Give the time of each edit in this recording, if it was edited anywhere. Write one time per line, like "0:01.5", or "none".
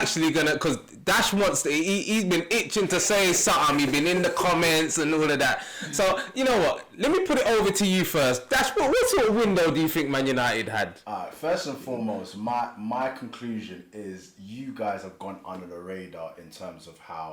none